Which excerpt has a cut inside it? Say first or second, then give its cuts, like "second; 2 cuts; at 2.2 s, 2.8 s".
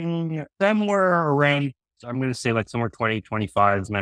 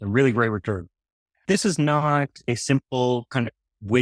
second; 1 cut; at 1.4 s